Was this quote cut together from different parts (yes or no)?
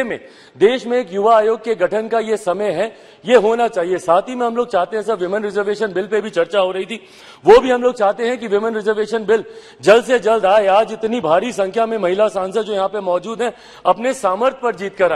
no